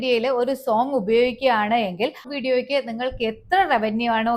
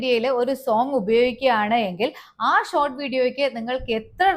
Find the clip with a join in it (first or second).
first